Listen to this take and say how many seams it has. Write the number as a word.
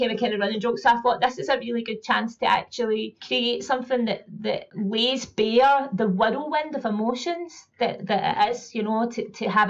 two